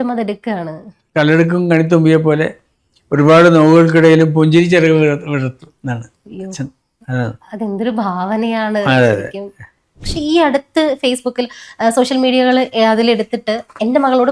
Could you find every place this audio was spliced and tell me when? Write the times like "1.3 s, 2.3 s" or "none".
10.0 s

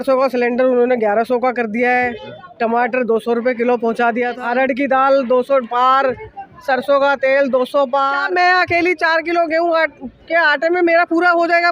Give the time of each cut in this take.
4.3 s, 8.2 s

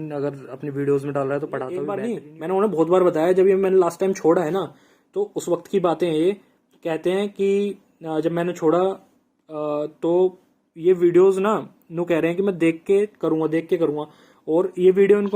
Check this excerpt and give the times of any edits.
2.0 s

